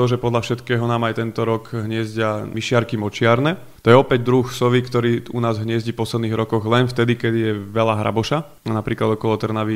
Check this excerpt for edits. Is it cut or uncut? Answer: cut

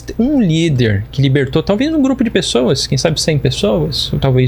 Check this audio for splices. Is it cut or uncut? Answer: uncut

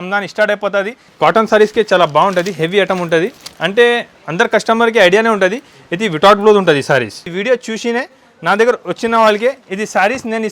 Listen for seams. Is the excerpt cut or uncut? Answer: cut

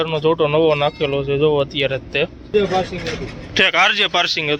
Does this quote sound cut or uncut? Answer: cut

